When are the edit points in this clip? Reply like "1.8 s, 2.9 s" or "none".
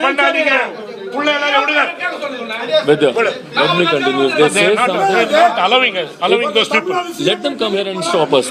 none